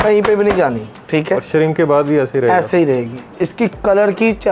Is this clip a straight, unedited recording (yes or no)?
no